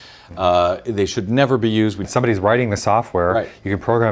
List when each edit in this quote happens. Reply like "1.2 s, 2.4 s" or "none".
2.1 s